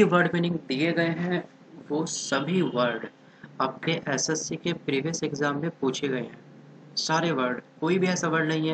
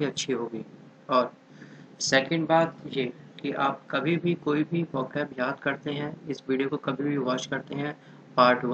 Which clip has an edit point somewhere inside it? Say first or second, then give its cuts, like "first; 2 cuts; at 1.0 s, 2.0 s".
second; 1 cut; at 1.0 s